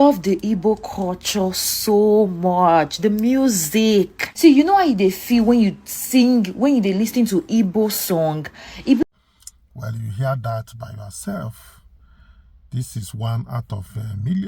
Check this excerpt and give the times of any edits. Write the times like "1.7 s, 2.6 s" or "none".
9.0 s